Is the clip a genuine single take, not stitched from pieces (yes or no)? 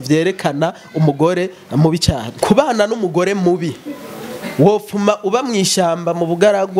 no